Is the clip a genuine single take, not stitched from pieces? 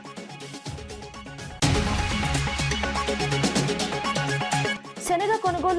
yes; 0 cuts

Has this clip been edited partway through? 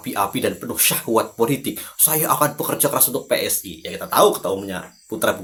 no; 0 cuts

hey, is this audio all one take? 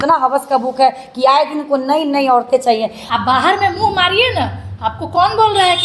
no; 1 cut; at 3.0 s

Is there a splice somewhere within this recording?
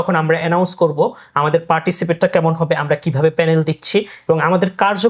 no; 0 cuts

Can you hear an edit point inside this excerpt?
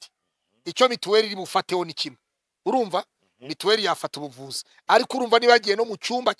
no; 0 cuts

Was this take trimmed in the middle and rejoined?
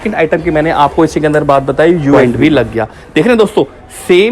yes; 1 cut; at 2.2 s

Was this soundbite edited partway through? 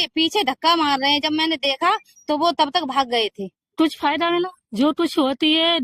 yes; 1 cut; at 3.7 s

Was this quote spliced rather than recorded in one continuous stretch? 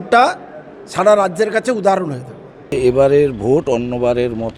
yes; 1 cut; at 2.7 s

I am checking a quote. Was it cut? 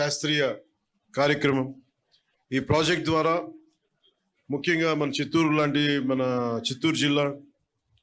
no; 0 cuts

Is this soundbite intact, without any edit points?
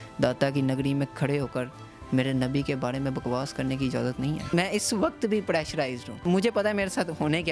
no; 2 cuts; at 4.5 s, 6.2 s

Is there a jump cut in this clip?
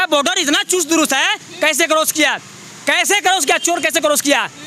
no; 0 cuts

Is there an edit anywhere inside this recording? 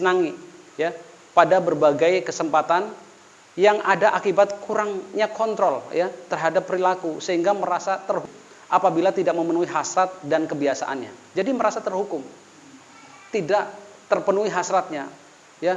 yes; 1 cut; at 8.3 s

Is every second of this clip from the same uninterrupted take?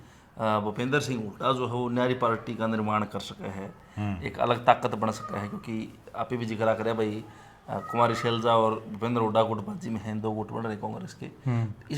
yes; 0 cuts

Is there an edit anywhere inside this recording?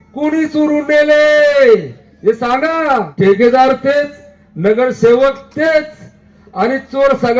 yes; 1 cut; at 3.1 s

